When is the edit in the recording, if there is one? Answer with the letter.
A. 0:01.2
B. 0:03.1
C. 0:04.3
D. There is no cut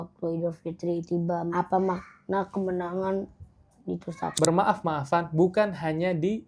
C